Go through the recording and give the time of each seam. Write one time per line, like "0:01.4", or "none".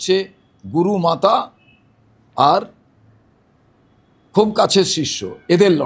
none